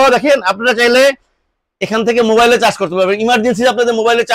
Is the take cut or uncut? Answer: uncut